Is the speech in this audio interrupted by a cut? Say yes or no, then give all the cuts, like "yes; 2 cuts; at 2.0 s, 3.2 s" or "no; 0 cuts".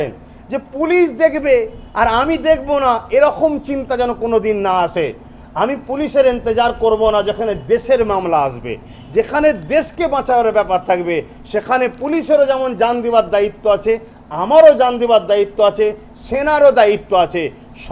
no; 0 cuts